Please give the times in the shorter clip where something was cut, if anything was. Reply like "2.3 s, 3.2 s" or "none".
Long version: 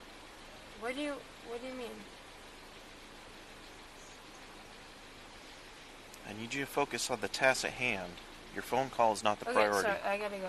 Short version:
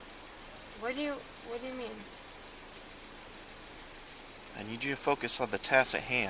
3.9 s